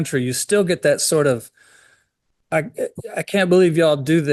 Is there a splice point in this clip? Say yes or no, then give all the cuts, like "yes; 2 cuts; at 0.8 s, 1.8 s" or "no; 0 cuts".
no; 0 cuts